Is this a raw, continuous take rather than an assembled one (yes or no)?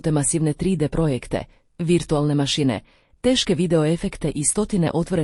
yes